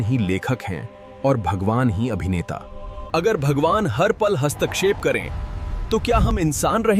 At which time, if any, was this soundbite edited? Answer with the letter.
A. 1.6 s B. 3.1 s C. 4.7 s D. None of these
B